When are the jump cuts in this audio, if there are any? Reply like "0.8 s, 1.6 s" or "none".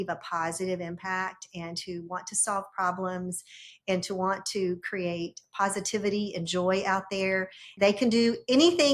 7.7 s

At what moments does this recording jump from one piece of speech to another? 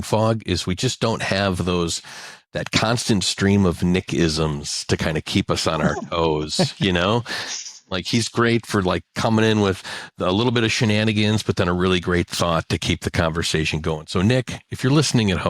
none

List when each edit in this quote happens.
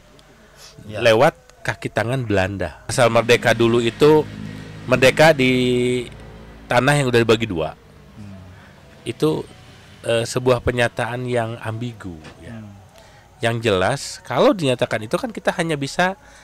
2.9 s

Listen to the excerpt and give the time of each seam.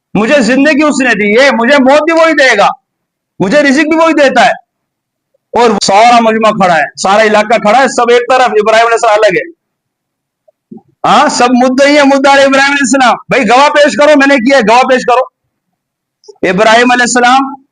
5.8 s

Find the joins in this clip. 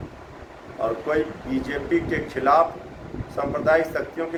none

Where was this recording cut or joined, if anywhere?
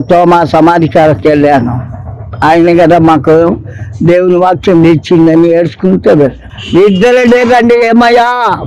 6.5 s

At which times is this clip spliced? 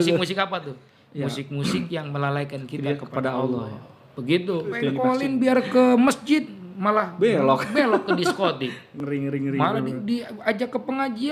5.0 s

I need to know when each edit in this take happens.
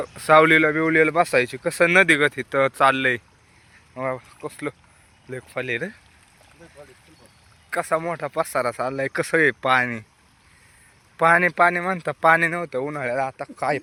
none

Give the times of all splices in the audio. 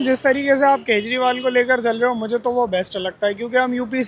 none

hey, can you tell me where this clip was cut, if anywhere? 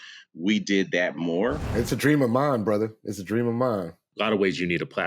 1.9 s, 4.0 s

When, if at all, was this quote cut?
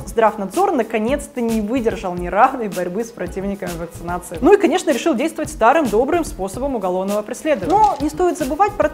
4.3 s, 7.6 s

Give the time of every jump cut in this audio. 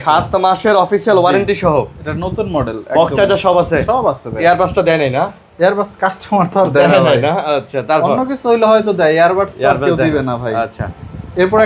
none

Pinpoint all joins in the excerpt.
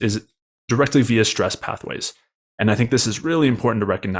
none

